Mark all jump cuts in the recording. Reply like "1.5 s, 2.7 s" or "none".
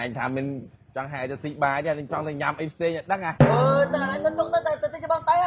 none